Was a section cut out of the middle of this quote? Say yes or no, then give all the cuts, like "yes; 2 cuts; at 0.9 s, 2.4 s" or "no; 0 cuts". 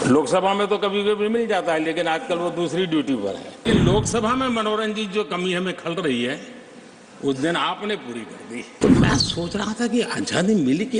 yes; 2 cuts; at 3.7 s, 8.7 s